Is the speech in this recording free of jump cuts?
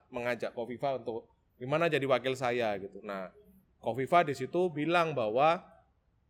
yes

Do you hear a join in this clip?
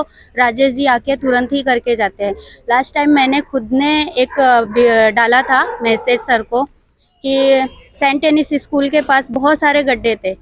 no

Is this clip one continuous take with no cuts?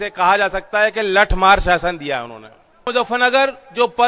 no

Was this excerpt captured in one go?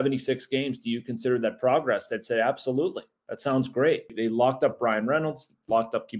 no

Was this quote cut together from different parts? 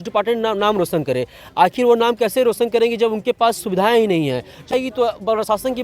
yes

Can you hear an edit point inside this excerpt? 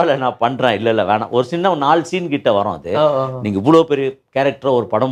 no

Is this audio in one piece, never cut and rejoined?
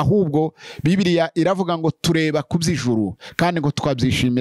yes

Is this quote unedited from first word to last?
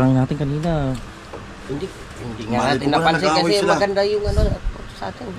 yes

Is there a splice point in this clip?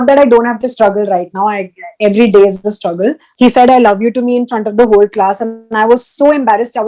yes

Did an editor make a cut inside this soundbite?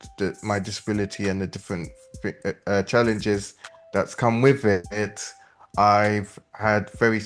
no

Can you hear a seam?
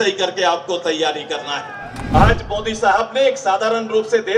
yes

